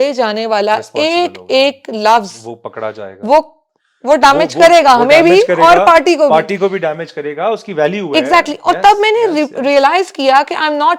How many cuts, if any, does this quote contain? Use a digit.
0